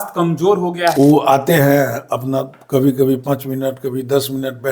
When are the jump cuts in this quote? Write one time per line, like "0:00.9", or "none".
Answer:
0:00.9